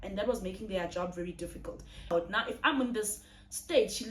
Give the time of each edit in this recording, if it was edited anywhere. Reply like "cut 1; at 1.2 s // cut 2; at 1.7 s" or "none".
cut 1; at 2.1 s